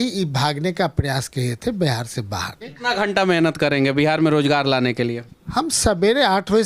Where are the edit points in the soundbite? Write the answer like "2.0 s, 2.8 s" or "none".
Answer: 2.8 s